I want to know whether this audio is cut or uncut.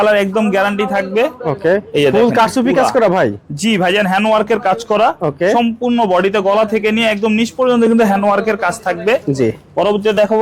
uncut